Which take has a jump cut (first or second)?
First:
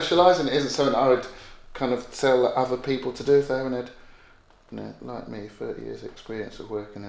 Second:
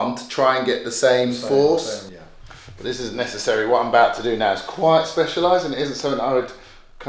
second